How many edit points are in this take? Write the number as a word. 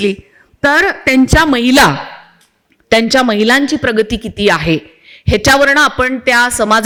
zero